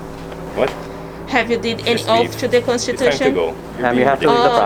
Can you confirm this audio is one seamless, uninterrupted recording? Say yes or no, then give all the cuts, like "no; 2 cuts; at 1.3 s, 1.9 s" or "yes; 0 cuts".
yes; 0 cuts